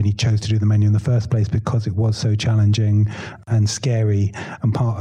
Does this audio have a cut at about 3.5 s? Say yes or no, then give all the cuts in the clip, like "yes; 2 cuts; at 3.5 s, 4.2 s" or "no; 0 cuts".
yes; 1 cut; at 3.5 s